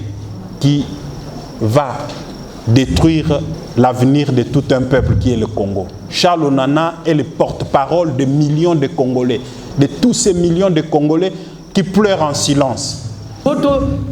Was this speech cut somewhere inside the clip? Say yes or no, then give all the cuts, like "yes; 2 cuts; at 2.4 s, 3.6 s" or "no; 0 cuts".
yes; 2 cuts; at 3.6 s, 13.5 s